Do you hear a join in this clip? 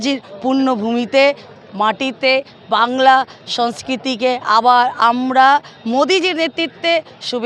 no; 0 cuts

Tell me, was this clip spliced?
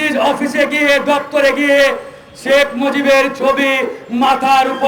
no; 0 cuts

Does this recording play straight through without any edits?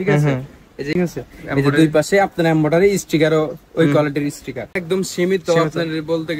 no; 2 cuts; at 0.9 s, 4.8 s

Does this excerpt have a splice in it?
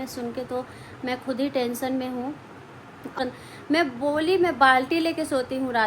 yes; 1 cut; at 3.2 s

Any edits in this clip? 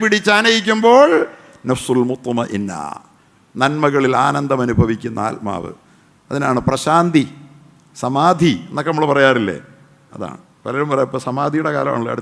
no; 0 cuts

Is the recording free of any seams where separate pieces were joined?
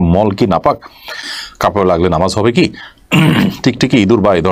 yes; 0 cuts

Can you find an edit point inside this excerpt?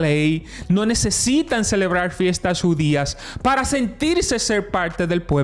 no; 0 cuts

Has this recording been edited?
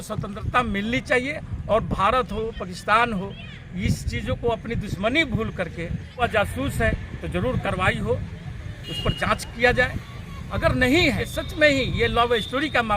yes; 2 cuts; at 6.2 s, 11.3 s

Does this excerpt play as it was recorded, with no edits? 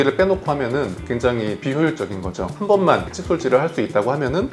yes; 0 cuts

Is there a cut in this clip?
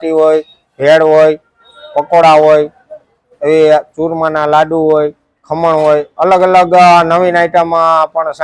no; 0 cuts

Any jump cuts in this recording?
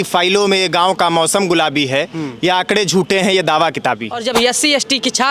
yes; 1 cut; at 4.2 s

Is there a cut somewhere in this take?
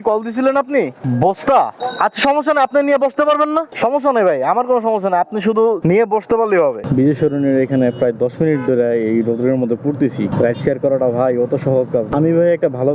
yes; 6 cuts; at 1.0 s, 1.8 s, 3.7 s, 6.8 s, 10.3 s, 12.1 s

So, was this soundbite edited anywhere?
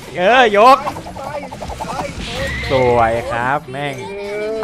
no; 0 cuts

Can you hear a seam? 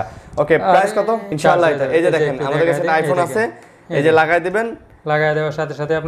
yes; 1 cut; at 1.3 s

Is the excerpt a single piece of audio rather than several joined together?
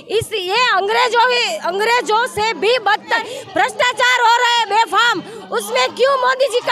no; 1 cut; at 3.2 s

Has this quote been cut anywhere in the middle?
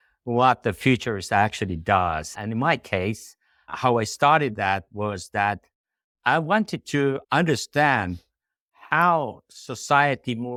no; 0 cuts

